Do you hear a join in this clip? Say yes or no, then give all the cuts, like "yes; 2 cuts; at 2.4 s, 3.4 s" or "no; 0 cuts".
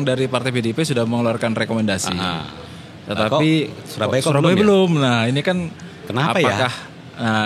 no; 0 cuts